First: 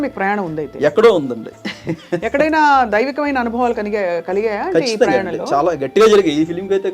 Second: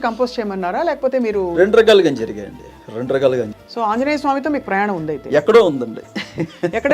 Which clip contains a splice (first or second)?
second